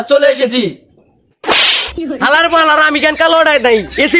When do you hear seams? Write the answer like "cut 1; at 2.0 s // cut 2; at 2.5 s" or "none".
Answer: none